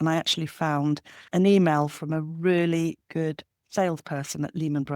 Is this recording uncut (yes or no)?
yes